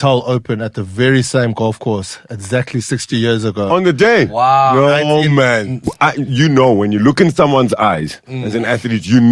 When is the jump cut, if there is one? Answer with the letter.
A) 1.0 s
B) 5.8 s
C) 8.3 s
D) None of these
B